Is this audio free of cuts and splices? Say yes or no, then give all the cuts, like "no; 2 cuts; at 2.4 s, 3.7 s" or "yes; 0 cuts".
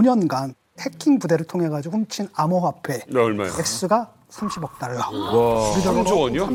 yes; 0 cuts